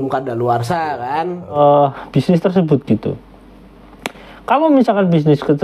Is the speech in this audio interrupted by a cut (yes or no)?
yes